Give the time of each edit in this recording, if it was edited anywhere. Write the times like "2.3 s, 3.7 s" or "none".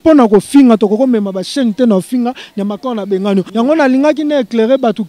3.5 s